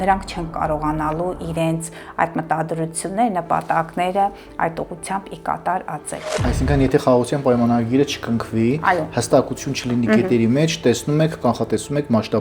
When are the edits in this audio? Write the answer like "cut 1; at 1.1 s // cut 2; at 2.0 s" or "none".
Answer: cut 1; at 6.4 s